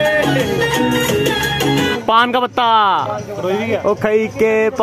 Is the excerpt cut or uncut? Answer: cut